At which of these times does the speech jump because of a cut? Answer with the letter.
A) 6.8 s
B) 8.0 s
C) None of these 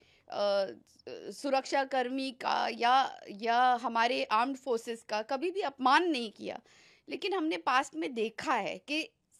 C